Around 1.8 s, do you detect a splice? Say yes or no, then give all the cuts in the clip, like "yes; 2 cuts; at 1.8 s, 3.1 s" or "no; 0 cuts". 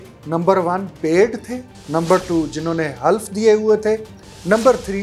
yes; 1 cut; at 1.8 s